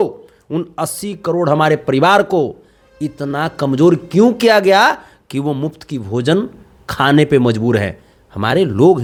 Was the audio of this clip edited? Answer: no; 0 cuts

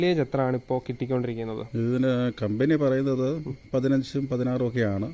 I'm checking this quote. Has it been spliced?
no; 0 cuts

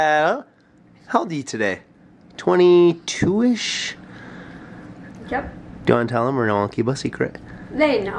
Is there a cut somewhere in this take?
no; 0 cuts

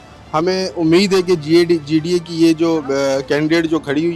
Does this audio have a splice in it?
no; 0 cuts

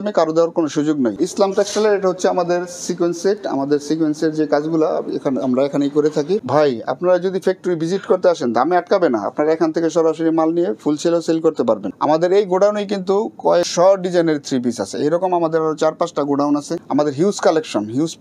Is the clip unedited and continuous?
no; 4 cuts; at 1.2 s, 6.4 s, 11.9 s, 16.8 s

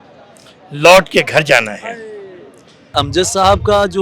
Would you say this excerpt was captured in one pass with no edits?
no; 1 cut; at 2.9 s

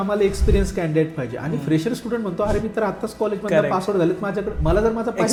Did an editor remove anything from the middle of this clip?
no; 0 cuts

